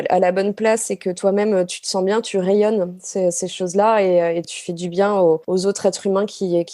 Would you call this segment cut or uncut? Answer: cut